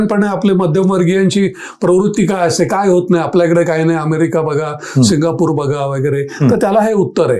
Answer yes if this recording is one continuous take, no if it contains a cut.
yes